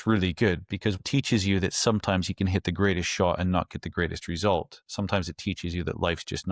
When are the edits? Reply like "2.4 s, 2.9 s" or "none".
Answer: 1.0 s